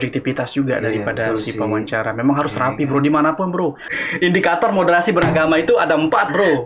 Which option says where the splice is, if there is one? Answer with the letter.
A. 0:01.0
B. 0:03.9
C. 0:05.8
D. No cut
B